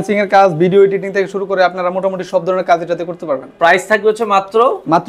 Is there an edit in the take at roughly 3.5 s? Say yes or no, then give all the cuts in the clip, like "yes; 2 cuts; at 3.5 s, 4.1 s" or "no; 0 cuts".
no; 0 cuts